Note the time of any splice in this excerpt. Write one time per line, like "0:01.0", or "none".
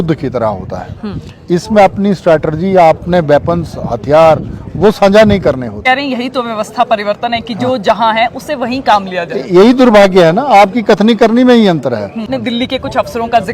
0:05.8
0:12.4